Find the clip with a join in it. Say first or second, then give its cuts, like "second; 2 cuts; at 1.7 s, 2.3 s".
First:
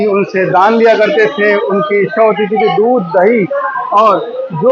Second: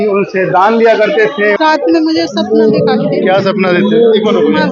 second; 1 cut; at 1.6 s